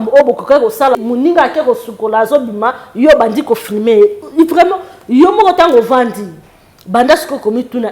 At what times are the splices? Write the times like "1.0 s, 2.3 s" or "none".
1.0 s